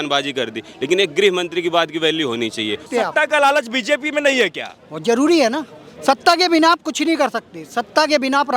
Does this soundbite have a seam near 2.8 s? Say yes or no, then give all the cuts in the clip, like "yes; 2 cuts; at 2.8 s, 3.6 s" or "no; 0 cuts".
yes; 1 cut; at 2.8 s